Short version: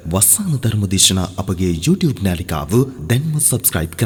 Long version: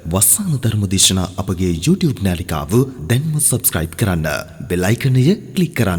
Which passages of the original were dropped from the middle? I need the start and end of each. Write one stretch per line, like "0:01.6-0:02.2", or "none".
none